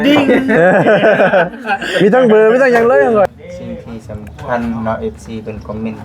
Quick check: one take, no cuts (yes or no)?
no